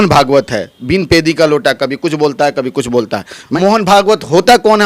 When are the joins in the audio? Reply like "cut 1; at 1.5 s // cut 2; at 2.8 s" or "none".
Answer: cut 1; at 3.4 s